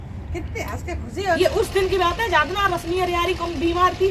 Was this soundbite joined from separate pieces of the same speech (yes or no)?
yes